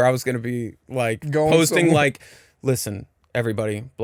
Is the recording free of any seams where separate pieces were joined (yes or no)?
yes